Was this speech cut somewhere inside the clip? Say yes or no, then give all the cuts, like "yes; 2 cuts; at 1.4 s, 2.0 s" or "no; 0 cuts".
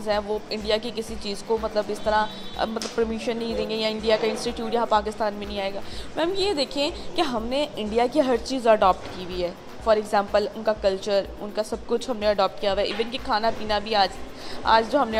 no; 0 cuts